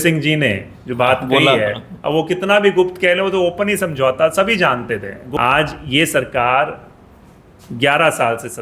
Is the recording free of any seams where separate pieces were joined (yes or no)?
no